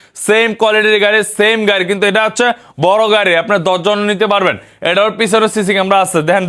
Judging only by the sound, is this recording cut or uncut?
uncut